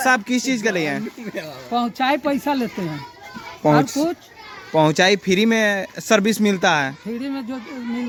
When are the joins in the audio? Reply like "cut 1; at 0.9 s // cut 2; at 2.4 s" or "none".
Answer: none